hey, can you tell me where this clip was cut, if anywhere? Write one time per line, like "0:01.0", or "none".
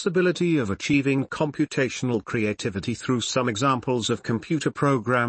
none